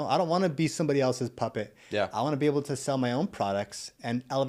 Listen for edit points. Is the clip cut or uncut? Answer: uncut